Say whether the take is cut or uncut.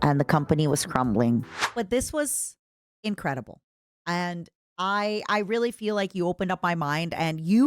cut